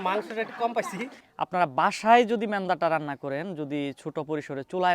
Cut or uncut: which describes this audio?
cut